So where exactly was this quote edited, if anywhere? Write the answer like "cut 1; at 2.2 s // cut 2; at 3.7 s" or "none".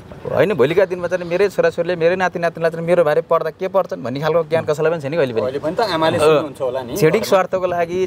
none